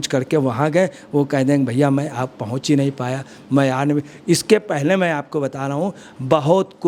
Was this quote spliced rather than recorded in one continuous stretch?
no; 0 cuts

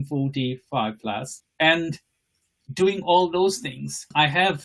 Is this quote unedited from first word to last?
yes; 0 cuts

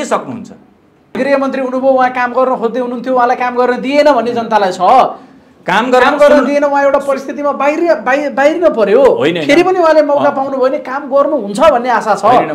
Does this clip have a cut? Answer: yes; 1 cut; at 1.1 s

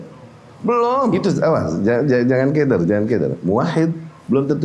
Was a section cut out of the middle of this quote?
yes; 1 cut; at 1.1 s

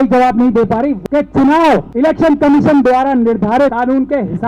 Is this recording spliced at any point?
yes; 3 cuts; at 1.0 s, 1.9 s, 3.7 s

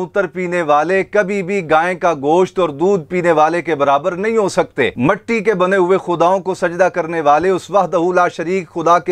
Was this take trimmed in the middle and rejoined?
no; 0 cuts

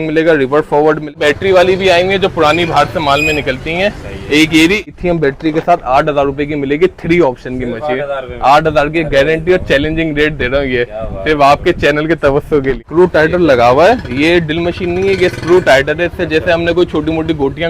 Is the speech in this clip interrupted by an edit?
yes; 3 cuts; at 1.2 s, 4.9 s, 12.8 s

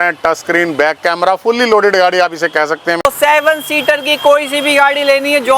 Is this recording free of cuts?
no; 1 cut; at 3.0 s

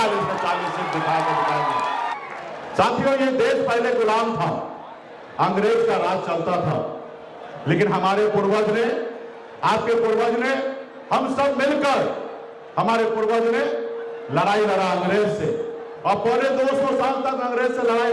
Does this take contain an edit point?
yes; 1 cut; at 2.2 s

